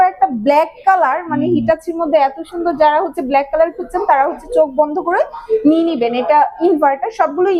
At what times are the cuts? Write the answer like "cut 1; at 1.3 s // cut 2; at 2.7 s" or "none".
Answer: cut 1; at 4.4 s